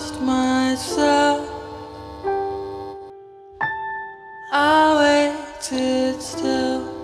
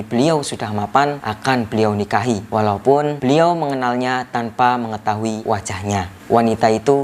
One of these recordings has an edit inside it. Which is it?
second; 4 cuts; at 1.3 s, 2.4 s, 3.2 s, 5.6 s

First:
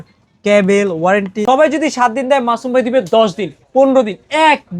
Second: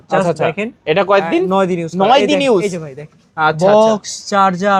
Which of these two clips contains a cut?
first; 1 cut; at 1.3 s

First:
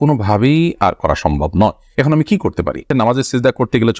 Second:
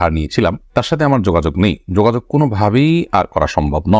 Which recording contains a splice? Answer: first; 1 cut; at 2.8 s

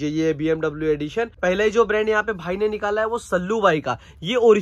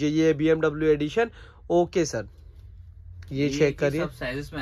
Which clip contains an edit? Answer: first; 1 cut; at 1.3 s

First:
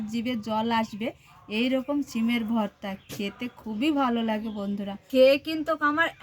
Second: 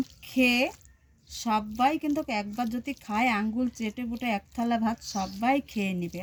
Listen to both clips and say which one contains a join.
first; 1 cut; at 4.9 s

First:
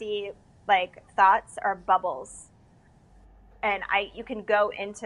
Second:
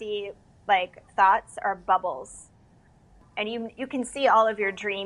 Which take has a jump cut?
second; 1 cut; at 3.2 s

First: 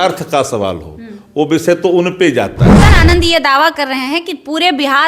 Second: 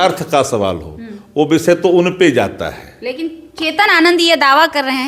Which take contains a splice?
first; 1 cut; at 2.8 s

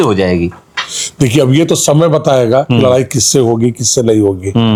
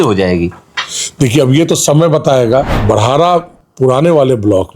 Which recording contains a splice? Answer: second; 1 cut; at 2.7 s

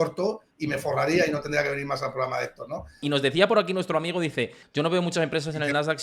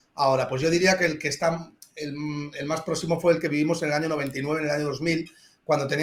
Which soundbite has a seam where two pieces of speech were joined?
first; 2 cuts; at 3.0 s, 4.6 s

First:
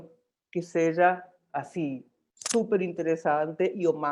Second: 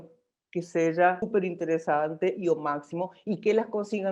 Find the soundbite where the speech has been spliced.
second; 1 cut; at 1.3 s

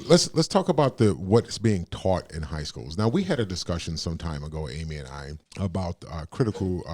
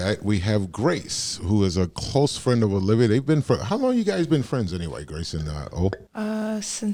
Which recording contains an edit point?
first; 1 cut; at 5.4 s

